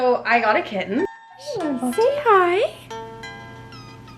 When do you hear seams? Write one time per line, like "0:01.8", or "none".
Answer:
0:01.4

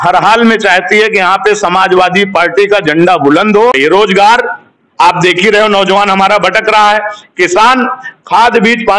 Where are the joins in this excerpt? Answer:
0:03.7

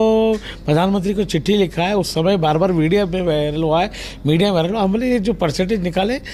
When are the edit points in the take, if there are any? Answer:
none

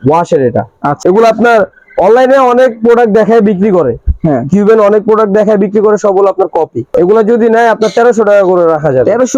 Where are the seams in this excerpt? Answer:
0:01.0
0:06.9

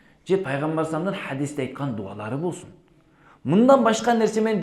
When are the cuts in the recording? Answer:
none

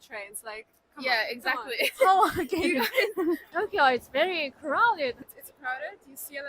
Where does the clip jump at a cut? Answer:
0:03.5
0:05.2

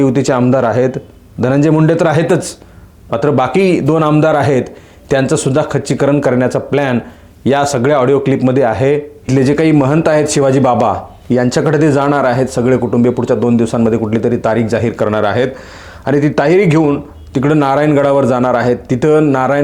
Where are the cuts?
0:09.1

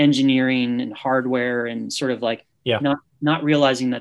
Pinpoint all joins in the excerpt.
none

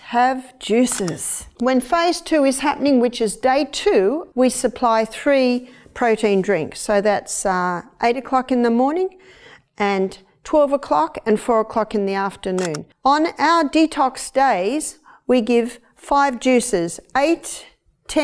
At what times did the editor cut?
0:01.5
0:04.2
0:12.9

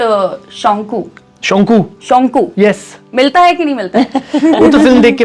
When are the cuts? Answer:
none

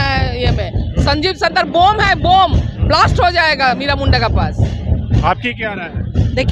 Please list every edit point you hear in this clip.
none

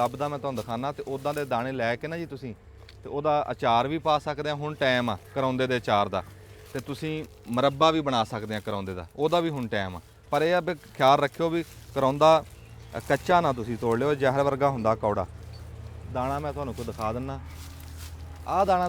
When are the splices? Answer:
none

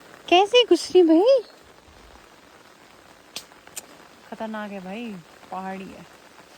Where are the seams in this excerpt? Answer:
none

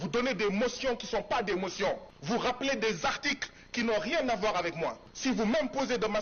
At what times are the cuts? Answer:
0:02.1
0:05.1

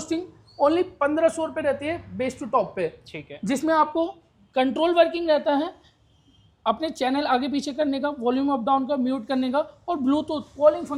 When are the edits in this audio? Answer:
none

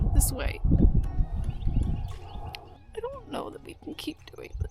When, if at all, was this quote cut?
0:02.7

